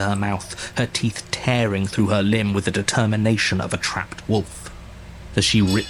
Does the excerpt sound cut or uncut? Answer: uncut